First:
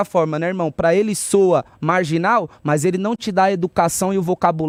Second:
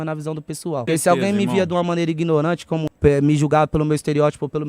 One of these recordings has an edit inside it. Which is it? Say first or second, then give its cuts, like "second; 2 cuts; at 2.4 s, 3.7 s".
second; 2 cuts; at 0.8 s, 2.9 s